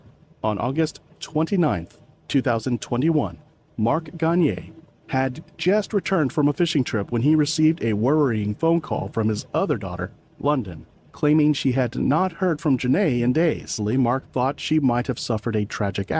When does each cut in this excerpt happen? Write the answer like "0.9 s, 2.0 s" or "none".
13.8 s